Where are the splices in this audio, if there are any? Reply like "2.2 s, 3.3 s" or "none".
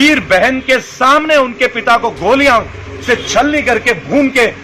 none

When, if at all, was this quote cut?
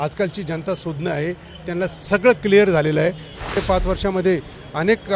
3.4 s

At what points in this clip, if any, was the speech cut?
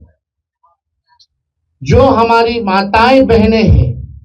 none

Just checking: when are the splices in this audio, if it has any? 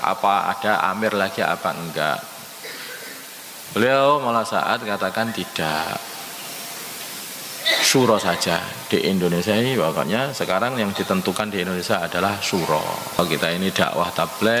13.2 s

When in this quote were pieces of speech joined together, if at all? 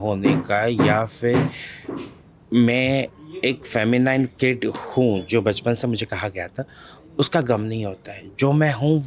none

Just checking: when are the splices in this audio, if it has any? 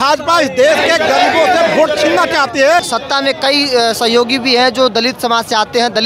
2.9 s

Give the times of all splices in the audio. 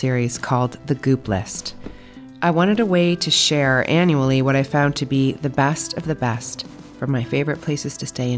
none

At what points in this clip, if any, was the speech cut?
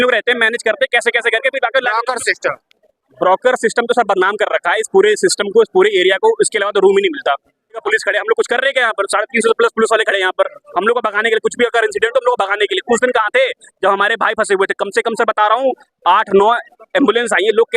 7.8 s

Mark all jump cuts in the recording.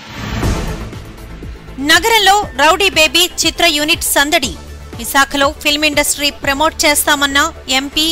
none

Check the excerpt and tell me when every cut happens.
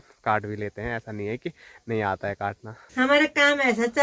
2.8 s

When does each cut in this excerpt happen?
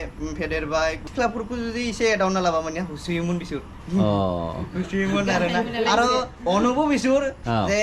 1.0 s

